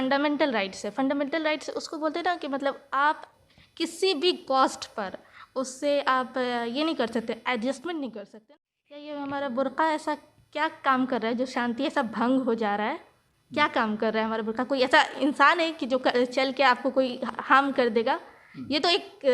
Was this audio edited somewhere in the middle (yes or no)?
yes